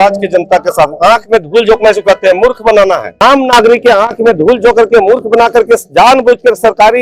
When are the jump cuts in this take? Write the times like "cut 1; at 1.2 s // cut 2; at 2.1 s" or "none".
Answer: cut 1; at 3.1 s